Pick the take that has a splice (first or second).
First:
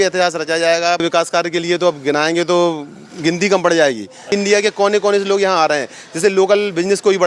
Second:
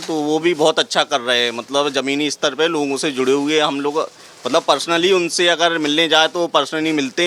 first